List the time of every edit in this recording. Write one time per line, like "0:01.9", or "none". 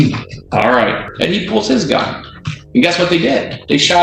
0:01.1